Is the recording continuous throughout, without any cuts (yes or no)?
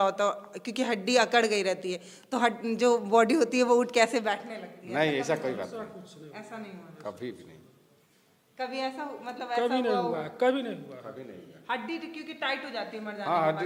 yes